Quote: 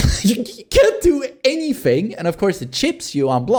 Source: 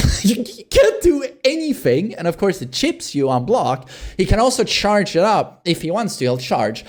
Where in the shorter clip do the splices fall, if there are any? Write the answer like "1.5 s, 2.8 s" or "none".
none